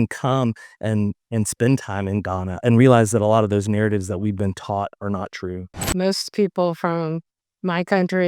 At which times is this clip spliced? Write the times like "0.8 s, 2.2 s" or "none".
2.6 s, 5.9 s